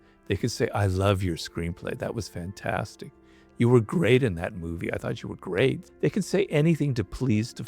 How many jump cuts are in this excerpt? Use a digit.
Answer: 1